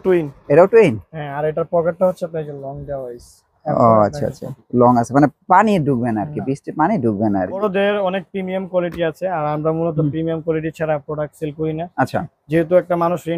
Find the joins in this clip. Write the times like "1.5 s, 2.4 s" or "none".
7.6 s

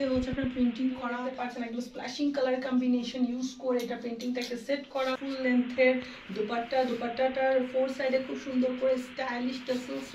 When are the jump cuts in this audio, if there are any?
1.3 s, 5.2 s

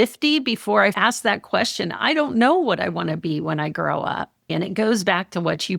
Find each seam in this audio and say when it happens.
4.5 s

